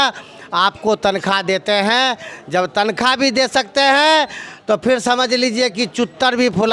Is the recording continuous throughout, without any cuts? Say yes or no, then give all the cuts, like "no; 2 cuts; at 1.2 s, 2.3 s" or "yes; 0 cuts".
yes; 0 cuts